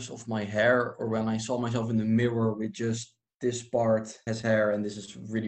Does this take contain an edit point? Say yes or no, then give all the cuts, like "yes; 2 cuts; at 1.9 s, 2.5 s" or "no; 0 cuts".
yes; 1 cut; at 4.2 s